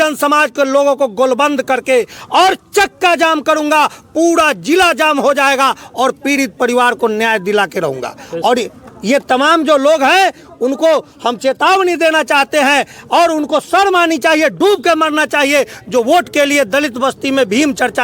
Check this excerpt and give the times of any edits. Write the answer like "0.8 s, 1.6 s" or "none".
none